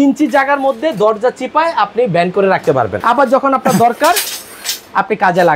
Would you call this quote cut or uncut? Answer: cut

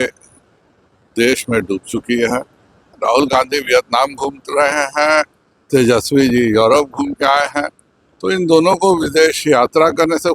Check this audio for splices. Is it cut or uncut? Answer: cut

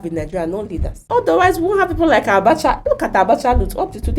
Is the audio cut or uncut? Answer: cut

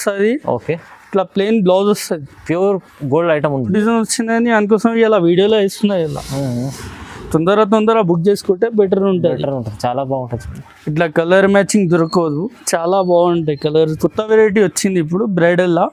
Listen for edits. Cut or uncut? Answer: cut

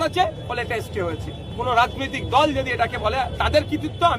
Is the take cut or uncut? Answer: cut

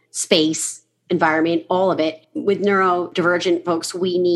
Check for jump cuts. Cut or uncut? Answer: cut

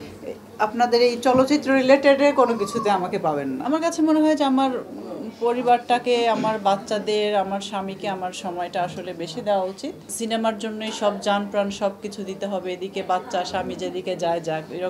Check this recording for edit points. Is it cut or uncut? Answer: cut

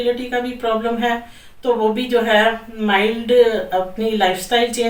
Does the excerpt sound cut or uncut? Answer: uncut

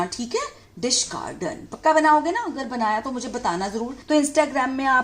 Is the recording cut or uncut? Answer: cut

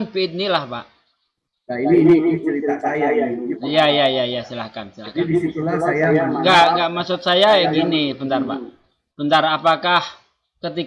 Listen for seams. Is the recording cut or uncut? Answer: uncut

